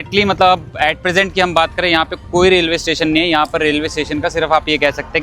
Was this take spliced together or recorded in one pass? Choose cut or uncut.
uncut